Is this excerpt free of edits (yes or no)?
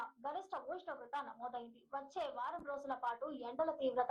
yes